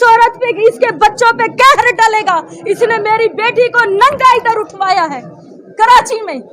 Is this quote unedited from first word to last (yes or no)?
yes